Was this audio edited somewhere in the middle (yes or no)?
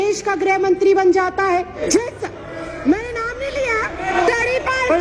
yes